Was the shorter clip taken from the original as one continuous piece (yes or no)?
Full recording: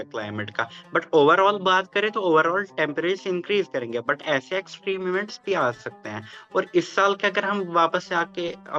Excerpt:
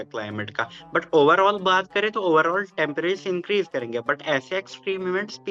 yes